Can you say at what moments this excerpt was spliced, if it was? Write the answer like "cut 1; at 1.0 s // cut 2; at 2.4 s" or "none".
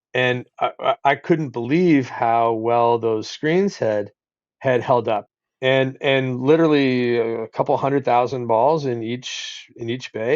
cut 1; at 5.3 s